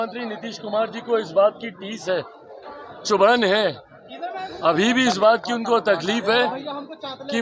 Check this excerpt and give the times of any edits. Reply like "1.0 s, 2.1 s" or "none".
none

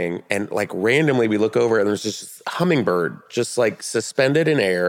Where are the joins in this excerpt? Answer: none

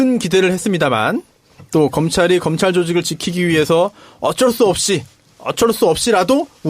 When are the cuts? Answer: 3.6 s

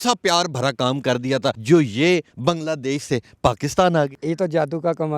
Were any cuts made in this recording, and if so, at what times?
1.6 s, 2.3 s, 4.2 s

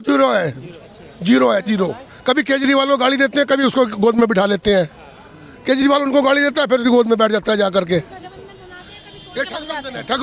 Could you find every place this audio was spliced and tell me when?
2.1 s

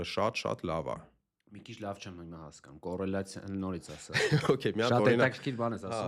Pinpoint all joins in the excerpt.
none

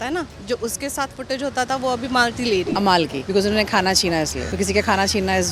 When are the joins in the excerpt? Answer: 2.8 s, 4.4 s

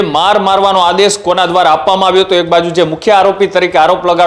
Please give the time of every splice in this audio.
none

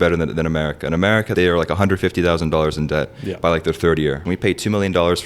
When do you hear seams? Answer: 1.3 s, 4.2 s

